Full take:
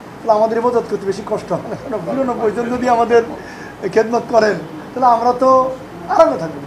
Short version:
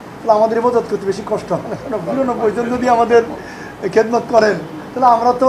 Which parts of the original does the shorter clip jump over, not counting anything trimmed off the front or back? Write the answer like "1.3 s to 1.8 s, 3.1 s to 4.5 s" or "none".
none